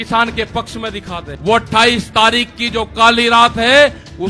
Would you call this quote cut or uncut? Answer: cut